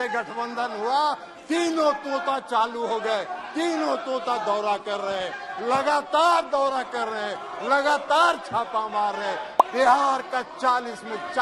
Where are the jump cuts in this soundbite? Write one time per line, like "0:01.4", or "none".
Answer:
0:09.5